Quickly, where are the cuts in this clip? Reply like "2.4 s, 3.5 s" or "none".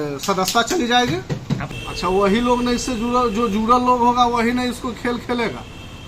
1.7 s